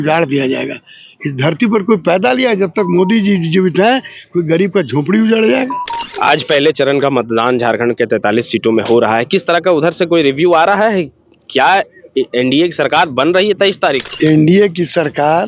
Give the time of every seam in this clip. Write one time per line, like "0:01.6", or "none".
0:06.0
0:14.1

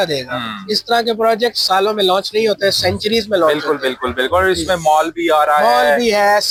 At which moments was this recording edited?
none

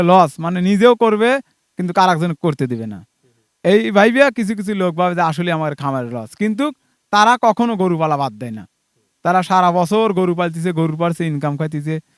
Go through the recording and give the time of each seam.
none

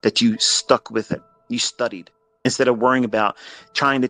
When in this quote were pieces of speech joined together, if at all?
0:01.3
0:02.4

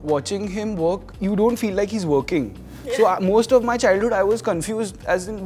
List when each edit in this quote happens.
0:01.1

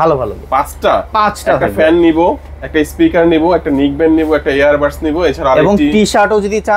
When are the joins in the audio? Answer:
none

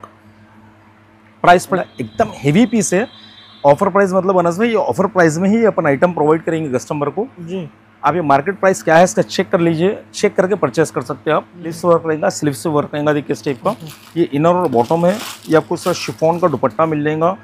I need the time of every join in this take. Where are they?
0:01.7
0:11.7

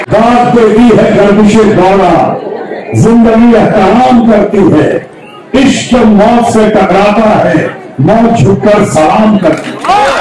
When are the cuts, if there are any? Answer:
none

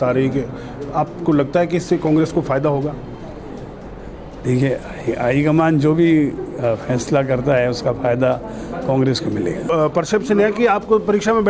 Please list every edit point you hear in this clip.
0:09.6

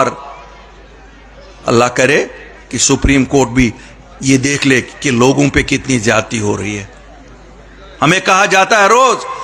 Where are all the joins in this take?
none

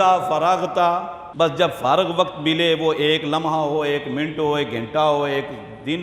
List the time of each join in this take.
0:01.2

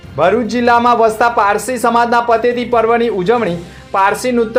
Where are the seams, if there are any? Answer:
none

